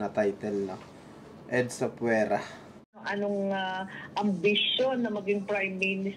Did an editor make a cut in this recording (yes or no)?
yes